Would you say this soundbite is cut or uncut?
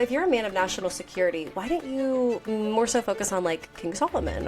uncut